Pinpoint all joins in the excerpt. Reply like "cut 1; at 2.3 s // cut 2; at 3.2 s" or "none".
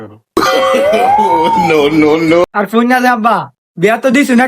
cut 1; at 2.4 s